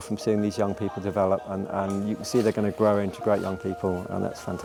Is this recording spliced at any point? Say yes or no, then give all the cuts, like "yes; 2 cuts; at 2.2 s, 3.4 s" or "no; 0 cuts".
no; 0 cuts